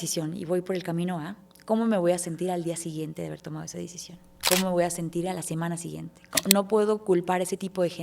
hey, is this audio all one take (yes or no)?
no